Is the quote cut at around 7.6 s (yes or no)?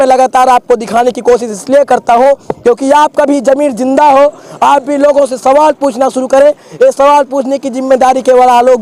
no